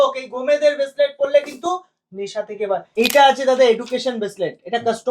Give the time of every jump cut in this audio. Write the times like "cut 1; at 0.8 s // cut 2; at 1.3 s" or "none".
cut 1; at 2.9 s